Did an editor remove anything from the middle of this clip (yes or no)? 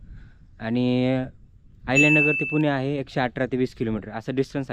no